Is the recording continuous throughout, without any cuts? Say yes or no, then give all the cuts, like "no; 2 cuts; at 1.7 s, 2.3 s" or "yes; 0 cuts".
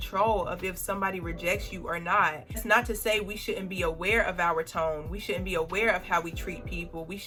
yes; 0 cuts